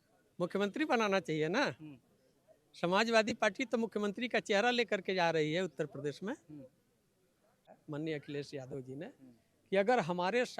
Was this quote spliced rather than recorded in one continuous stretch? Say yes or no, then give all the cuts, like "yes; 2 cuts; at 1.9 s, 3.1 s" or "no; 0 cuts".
yes; 1 cut; at 7.6 s